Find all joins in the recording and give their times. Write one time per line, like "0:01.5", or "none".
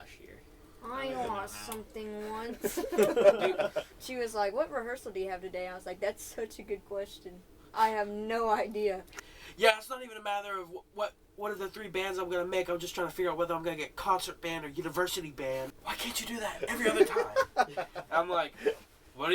0:03.9
0:09.1
0:15.8